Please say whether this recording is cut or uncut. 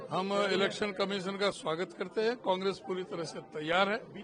uncut